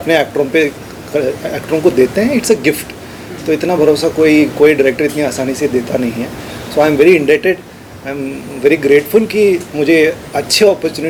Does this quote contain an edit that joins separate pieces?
no; 0 cuts

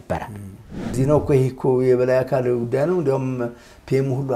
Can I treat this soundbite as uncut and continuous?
no; 1 cut; at 1.0 s

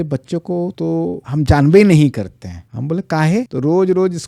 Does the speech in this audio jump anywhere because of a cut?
no; 0 cuts

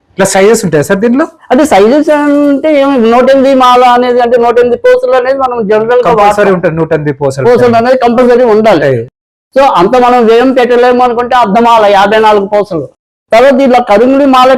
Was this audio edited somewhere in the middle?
no; 0 cuts

